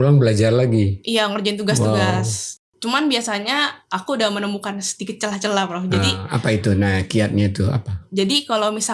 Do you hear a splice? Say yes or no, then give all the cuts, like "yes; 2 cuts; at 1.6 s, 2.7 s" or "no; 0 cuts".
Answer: no; 0 cuts